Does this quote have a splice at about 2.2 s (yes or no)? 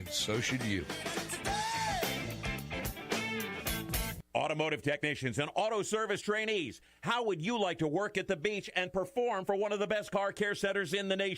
no